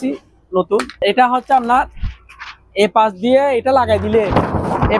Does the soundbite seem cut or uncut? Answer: cut